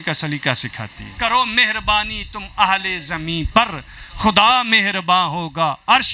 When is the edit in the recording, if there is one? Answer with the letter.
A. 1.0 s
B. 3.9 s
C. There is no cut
A